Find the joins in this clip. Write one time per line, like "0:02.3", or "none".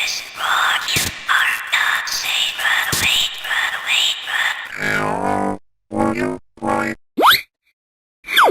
0:07.0